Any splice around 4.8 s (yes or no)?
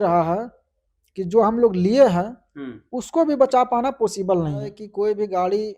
yes